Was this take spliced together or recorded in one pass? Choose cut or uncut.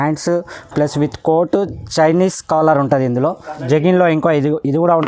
cut